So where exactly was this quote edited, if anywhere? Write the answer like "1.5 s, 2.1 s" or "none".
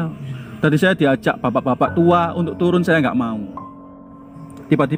4.0 s